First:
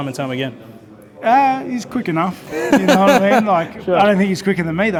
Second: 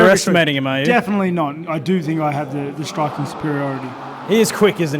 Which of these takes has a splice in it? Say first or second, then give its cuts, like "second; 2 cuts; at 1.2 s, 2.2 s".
second; 1 cut; at 1.6 s